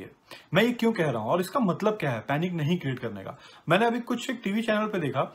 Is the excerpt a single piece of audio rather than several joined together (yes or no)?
yes